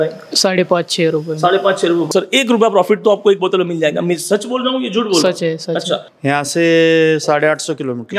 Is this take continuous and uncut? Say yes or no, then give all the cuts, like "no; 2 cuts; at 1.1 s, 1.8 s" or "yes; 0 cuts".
no; 2 cuts; at 2.1 s, 6.1 s